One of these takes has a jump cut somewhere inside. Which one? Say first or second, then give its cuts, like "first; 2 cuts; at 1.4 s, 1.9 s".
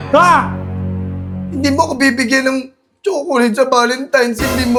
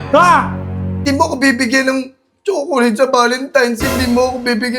second; 1 cut; at 1.0 s